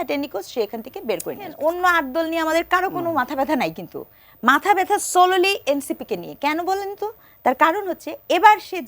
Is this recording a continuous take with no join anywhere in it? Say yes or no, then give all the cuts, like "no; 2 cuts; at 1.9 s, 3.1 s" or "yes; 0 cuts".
no; 1 cut; at 1.5 s